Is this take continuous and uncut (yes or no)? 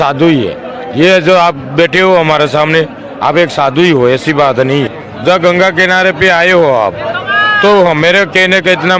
no